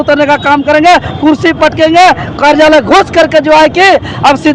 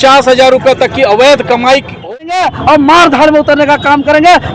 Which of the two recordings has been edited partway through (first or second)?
second